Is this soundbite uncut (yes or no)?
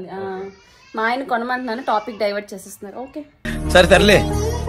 yes